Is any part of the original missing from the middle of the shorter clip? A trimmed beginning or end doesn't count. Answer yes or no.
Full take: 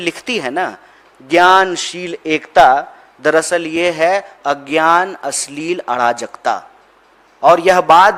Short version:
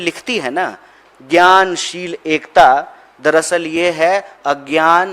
no